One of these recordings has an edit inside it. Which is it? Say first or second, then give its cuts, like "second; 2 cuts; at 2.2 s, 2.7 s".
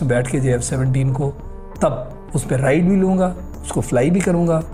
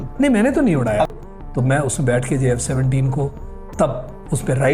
second; 1 cut; at 1.1 s